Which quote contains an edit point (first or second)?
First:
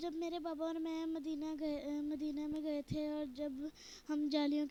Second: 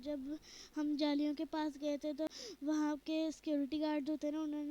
second